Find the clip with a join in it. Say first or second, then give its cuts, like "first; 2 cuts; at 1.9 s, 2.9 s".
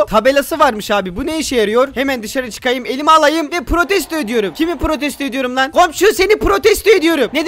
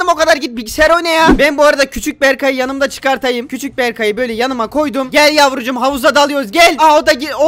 second; 1 cut; at 1.3 s